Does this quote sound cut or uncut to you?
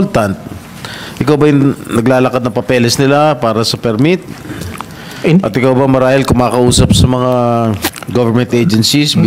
uncut